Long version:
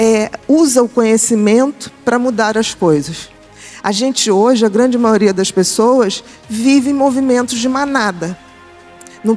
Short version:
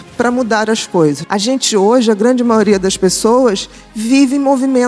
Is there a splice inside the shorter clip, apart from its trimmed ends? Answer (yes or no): yes